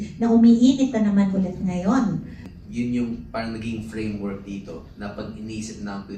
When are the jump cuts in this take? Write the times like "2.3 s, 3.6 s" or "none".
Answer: 2.4 s